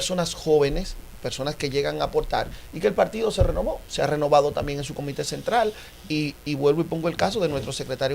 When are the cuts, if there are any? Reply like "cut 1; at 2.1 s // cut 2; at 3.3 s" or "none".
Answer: none

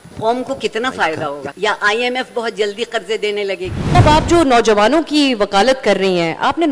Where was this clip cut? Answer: cut 1; at 1.5 s // cut 2; at 3.7 s

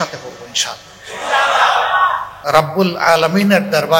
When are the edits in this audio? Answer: cut 1; at 2.3 s

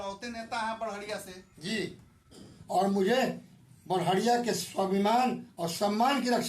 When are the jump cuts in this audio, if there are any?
cut 1; at 2.6 s

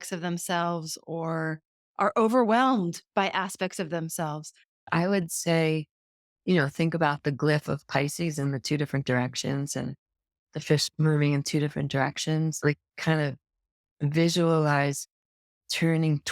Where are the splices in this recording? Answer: cut 1; at 4.8 s // cut 2; at 12.6 s

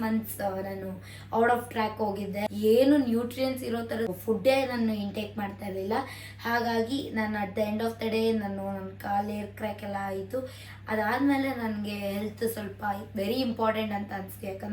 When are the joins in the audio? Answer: cut 1; at 2.5 s // cut 2; at 4.2 s

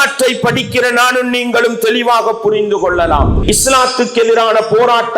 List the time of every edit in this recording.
cut 1; at 3.3 s

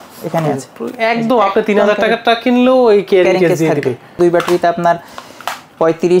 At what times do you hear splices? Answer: cut 1; at 4.2 s

